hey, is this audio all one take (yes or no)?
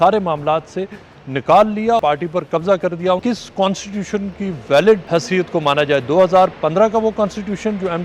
no